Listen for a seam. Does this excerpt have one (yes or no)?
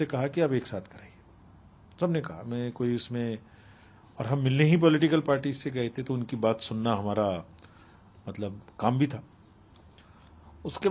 no